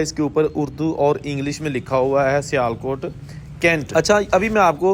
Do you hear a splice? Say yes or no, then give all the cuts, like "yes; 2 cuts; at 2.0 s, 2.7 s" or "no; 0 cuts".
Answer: yes; 1 cut; at 3.9 s